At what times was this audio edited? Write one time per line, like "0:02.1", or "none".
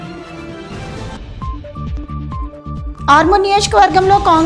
0:01.0